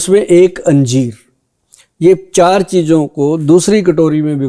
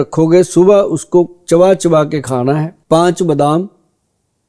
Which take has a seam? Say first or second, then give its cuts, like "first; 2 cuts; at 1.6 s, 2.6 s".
second; 1 cut; at 2.8 s